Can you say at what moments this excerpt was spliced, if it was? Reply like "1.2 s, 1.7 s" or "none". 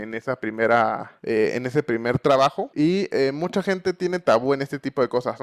1.1 s, 2.6 s